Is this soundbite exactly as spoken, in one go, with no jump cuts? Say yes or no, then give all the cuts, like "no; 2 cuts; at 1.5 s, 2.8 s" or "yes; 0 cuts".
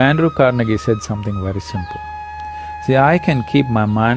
yes; 0 cuts